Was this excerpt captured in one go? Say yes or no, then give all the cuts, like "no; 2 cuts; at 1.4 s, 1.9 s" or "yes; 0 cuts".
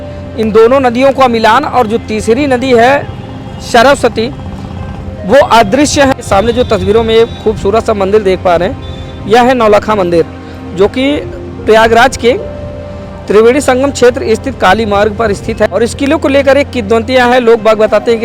no; 2 cuts; at 6.1 s, 15.7 s